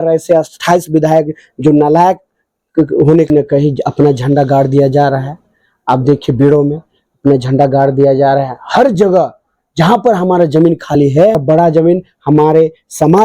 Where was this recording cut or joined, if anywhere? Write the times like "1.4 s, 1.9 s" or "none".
3.3 s, 11.4 s